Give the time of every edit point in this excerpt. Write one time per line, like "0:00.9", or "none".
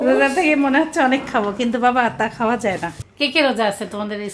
0:03.0